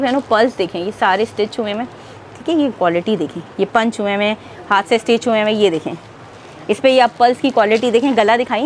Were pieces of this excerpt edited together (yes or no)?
no